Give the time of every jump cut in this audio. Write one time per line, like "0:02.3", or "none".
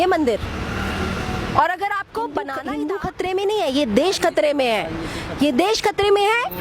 0:02.6